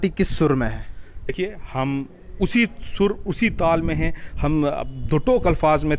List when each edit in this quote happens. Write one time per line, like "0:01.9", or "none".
0:01.3